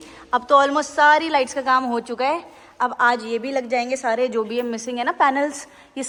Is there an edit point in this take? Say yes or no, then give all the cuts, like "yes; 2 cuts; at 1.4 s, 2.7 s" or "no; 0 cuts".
no; 0 cuts